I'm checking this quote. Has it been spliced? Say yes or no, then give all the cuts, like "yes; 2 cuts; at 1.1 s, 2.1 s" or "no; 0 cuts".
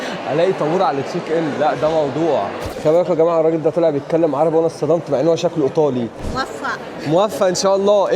yes; 2 cuts; at 2.7 s, 6.2 s